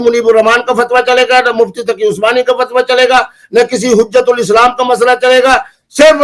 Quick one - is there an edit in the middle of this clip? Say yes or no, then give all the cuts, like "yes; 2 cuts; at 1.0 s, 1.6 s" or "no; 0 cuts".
no; 0 cuts